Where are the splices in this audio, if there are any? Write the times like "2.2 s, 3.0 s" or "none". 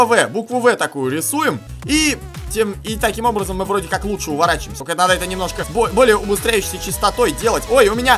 1.7 s, 4.7 s, 5.6 s